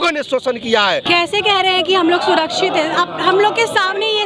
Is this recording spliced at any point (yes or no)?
yes